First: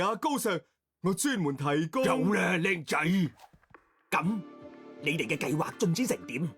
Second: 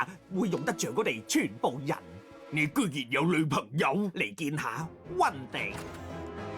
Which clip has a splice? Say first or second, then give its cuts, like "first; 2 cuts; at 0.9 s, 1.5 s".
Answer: second; 1 cut; at 5.7 s